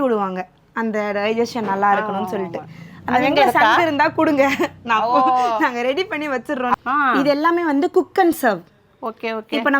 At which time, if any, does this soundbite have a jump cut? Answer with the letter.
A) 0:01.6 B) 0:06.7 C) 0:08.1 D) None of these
B